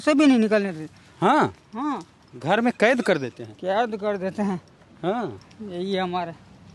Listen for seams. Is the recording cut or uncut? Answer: uncut